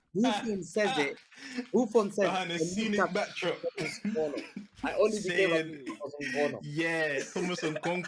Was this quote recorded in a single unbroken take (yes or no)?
yes